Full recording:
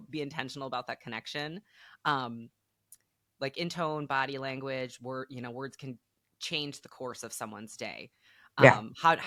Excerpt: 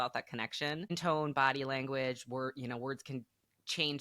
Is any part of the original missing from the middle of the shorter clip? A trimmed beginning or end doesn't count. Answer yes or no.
yes